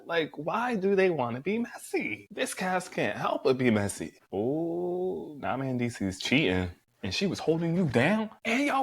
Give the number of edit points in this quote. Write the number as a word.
one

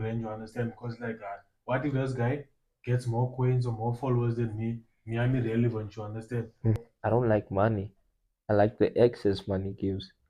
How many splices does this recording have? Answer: one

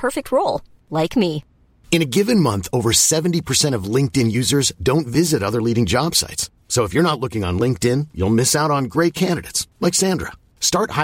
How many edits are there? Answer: zero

